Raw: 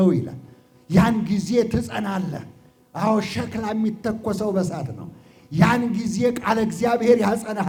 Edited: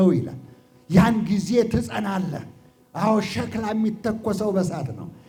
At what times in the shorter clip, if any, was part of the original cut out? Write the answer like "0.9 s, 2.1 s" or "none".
none